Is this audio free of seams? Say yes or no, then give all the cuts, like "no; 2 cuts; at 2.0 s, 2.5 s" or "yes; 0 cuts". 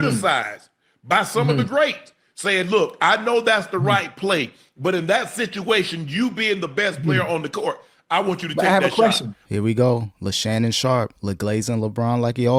no; 2 cuts; at 9.4 s, 10.2 s